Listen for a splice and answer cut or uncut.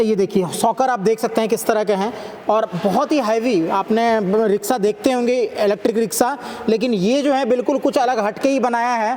uncut